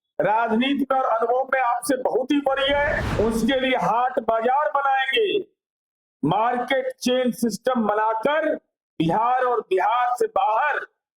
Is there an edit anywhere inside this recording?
yes; 1 cut; at 3.0 s

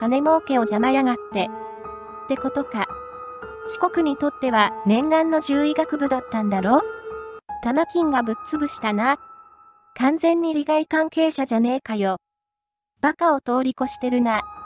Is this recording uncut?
yes; 0 cuts

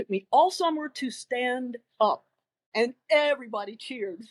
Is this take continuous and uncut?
yes; 0 cuts

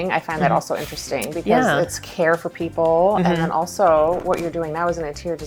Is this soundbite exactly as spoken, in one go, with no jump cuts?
yes; 0 cuts

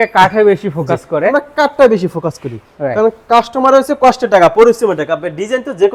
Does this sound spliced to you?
no; 0 cuts

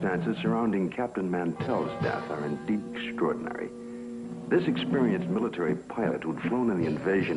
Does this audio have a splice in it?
no; 0 cuts

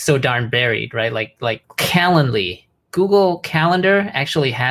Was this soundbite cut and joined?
yes; 1 cut; at 1.6 s

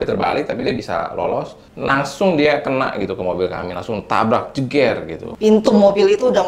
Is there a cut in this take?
yes; 2 cuts; at 1.6 s, 5.2 s

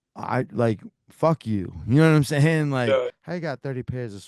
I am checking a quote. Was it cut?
yes; 1 cut; at 3.1 s

